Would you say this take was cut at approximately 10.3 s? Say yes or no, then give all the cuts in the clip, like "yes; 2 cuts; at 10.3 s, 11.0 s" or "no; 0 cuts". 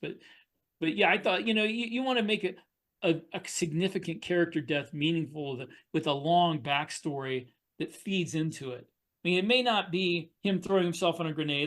yes; 1 cut; at 10.3 s